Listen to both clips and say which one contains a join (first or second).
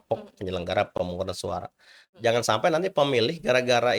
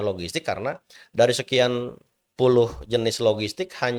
first